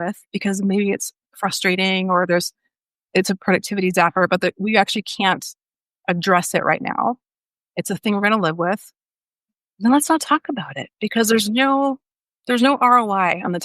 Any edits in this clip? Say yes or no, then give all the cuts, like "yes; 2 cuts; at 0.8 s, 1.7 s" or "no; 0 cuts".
no; 0 cuts